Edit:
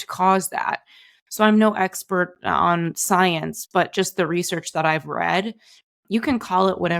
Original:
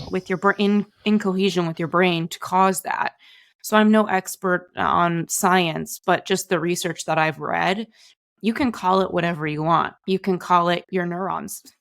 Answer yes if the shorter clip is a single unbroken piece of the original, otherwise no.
yes